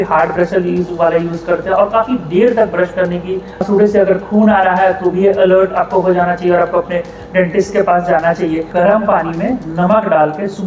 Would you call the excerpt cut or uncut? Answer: cut